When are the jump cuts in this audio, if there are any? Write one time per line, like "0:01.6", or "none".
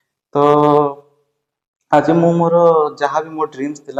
none